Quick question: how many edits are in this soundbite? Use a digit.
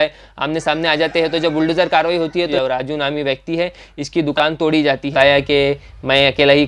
2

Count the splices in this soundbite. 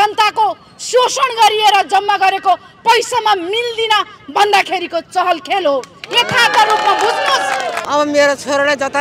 1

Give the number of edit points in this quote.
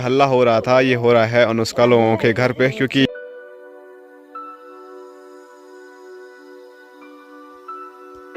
1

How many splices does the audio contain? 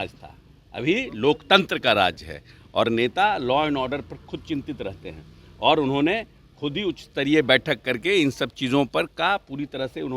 0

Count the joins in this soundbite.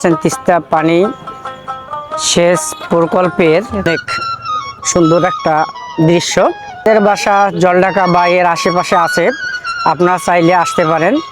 2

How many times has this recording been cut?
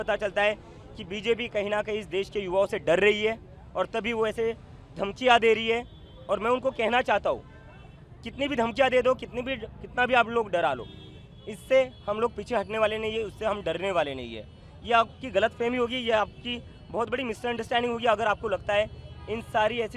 0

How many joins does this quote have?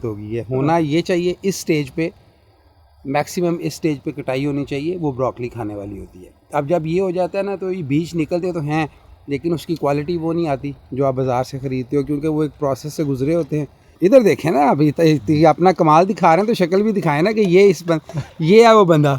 1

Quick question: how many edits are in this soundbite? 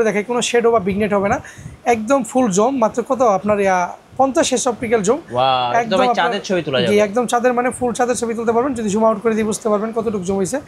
0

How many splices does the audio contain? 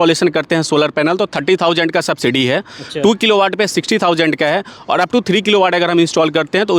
0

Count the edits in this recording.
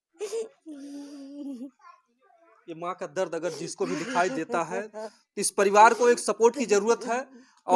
0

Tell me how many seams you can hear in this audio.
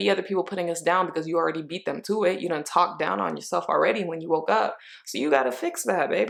0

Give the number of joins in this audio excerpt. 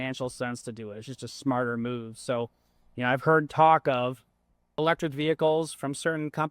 1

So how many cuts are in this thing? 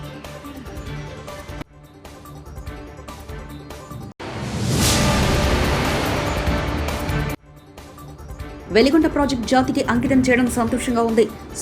1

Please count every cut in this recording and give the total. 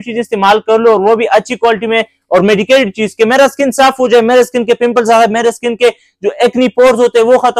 0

